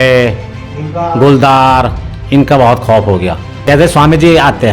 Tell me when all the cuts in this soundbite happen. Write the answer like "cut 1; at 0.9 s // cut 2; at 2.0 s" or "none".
cut 1; at 3.5 s